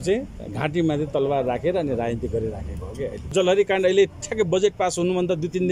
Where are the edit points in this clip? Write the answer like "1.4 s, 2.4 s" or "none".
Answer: 3.3 s